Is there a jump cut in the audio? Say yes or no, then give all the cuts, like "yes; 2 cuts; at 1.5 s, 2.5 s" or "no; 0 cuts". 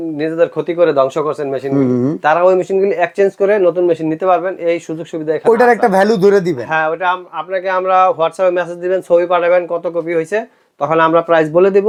no; 0 cuts